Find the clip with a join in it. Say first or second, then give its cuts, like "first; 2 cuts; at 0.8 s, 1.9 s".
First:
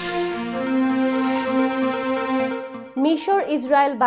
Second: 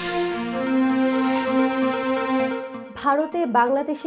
second; 1 cut; at 2.7 s